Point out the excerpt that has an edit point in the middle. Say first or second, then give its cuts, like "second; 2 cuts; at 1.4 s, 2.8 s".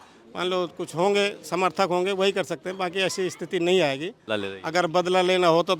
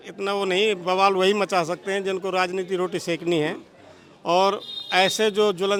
first; 1 cut; at 4.1 s